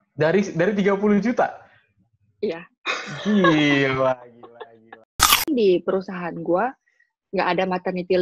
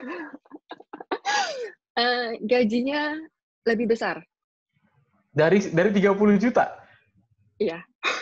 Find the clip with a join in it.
first; 1 cut; at 5.5 s

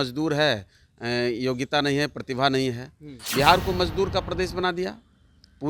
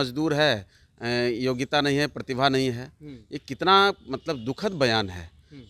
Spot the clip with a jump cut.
first; 1 cut; at 3.2 s

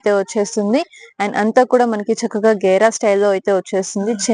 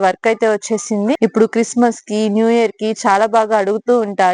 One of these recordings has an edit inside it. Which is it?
second; 1 cut; at 1.2 s

